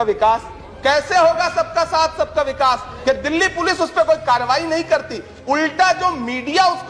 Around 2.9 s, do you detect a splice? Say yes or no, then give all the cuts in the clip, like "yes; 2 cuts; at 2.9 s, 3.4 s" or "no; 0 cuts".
yes; 1 cut; at 2.9 s